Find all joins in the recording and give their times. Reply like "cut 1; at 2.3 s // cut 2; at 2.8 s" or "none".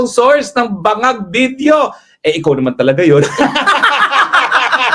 none